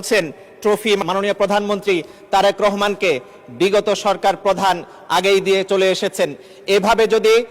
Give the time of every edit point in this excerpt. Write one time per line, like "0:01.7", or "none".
0:01.0